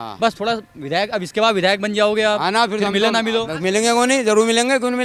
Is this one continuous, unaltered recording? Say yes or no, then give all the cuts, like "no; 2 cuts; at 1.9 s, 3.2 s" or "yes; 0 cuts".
yes; 0 cuts